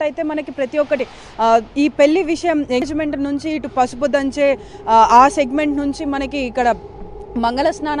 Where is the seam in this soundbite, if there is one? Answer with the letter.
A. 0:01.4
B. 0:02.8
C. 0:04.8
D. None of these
B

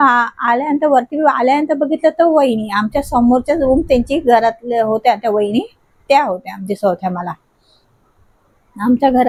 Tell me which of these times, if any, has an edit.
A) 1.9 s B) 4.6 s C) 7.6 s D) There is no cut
D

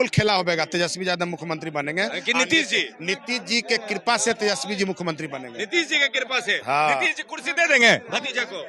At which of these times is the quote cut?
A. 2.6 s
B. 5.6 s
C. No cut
C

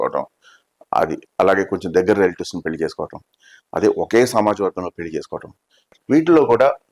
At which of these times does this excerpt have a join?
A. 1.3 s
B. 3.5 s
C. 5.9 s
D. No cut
C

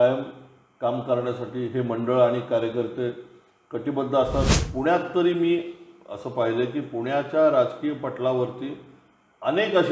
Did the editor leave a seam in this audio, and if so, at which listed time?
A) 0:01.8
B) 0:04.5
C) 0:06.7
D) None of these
B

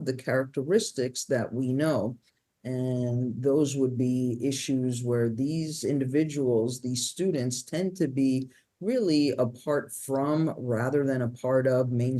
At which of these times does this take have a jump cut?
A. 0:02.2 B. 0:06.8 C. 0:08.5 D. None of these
D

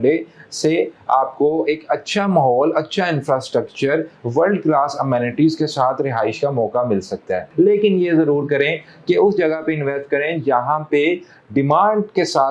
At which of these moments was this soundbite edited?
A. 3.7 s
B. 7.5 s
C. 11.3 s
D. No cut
B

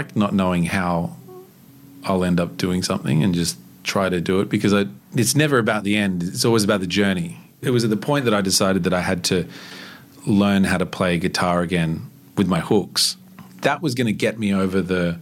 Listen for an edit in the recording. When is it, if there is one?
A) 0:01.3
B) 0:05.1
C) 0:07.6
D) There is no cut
C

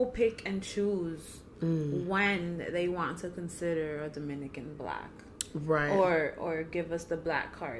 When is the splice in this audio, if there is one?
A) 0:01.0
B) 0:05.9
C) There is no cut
C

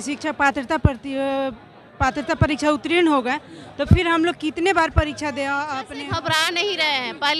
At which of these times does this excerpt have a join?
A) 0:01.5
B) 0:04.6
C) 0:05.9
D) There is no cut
C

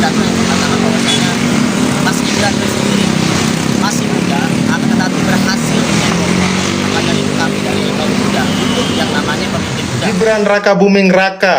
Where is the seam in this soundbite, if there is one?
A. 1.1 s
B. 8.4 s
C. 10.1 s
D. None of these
C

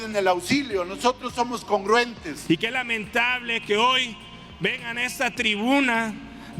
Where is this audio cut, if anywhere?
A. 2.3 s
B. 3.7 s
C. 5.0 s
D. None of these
A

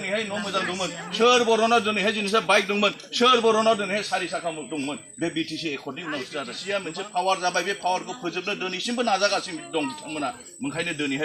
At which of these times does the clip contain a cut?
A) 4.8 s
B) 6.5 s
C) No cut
B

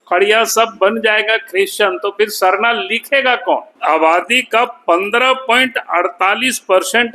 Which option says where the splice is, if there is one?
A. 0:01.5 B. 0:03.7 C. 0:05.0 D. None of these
B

